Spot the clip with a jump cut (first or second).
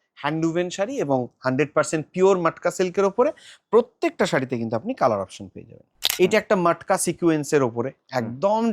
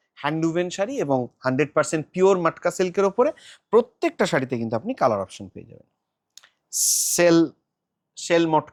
first